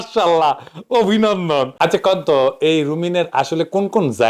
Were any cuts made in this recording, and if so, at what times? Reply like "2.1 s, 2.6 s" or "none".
1.7 s